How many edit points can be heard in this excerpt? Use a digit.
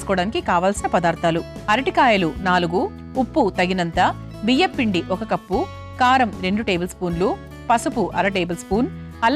1